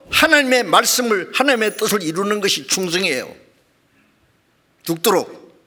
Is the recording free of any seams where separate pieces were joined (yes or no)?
yes